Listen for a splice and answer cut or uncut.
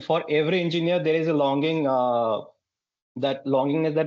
uncut